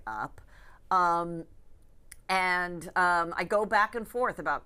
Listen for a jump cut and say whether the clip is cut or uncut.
uncut